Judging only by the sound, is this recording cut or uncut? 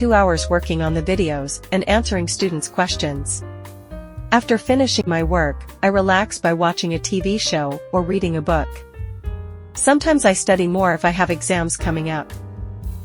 uncut